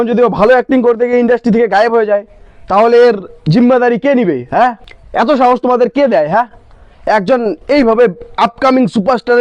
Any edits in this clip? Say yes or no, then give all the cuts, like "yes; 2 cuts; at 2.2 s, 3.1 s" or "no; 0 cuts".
no; 0 cuts